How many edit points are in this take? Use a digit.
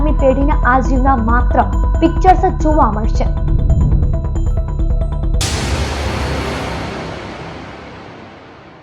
1